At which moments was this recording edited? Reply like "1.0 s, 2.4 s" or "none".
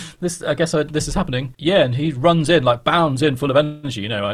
1.5 s